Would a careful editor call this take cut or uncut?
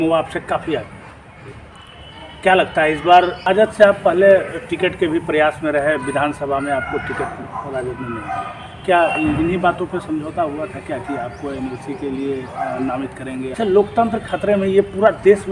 cut